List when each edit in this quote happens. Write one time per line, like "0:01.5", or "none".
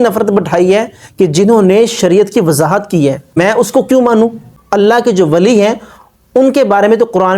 0:03.3
0:04.4